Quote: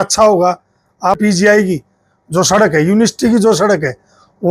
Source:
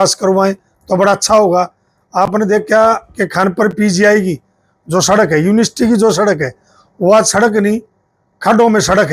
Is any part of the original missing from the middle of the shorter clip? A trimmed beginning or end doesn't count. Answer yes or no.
yes